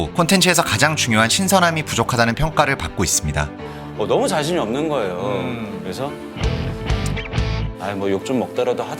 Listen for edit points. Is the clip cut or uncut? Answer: cut